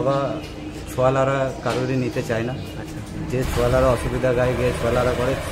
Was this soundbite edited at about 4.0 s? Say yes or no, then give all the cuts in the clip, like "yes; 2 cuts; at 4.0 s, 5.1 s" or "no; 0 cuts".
no; 0 cuts